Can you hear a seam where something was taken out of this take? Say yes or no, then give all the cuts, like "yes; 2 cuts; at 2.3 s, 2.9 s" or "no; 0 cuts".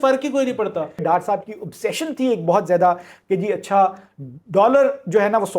yes; 1 cut; at 1.0 s